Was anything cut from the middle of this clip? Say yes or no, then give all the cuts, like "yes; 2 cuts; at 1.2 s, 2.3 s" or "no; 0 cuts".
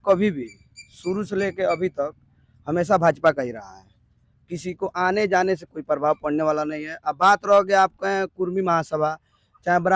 no; 0 cuts